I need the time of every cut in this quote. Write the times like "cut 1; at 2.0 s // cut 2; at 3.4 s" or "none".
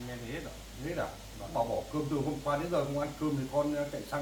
none